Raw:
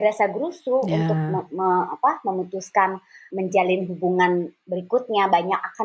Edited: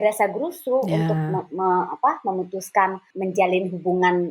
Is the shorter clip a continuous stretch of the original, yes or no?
no